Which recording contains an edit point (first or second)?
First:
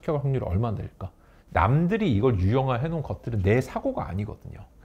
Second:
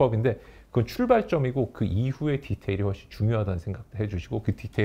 first